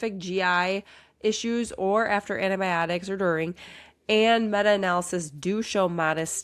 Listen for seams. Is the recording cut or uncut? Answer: uncut